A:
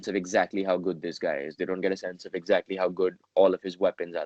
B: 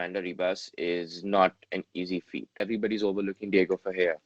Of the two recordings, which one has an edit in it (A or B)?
B